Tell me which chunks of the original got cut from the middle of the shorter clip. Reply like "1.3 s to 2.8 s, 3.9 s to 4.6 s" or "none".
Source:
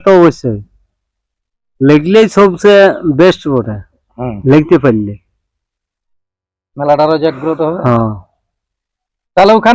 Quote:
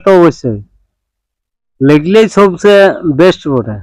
none